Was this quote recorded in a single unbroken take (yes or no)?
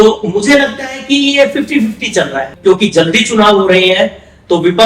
no